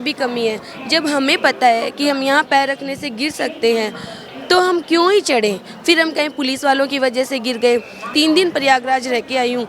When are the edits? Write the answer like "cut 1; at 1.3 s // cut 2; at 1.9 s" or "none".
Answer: cut 1; at 8.1 s